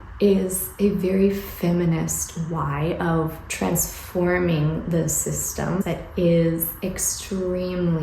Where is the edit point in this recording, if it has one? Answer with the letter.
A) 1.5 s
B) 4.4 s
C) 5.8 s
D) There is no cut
C